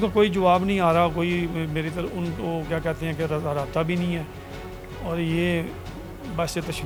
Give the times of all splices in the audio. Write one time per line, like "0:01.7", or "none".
none